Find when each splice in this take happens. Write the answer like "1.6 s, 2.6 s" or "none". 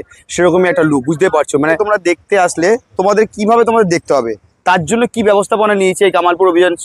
1.7 s